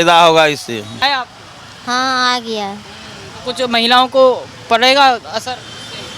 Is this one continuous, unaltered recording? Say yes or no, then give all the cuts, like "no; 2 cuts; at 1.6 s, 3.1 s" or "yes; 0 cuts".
no; 1 cut; at 1.0 s